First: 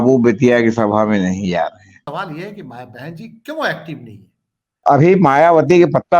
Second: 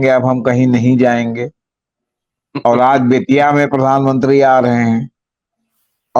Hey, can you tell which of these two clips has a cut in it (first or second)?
first